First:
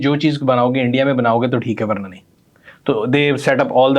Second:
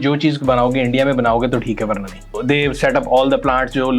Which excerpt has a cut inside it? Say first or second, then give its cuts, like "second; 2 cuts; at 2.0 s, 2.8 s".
second; 1 cut; at 2.4 s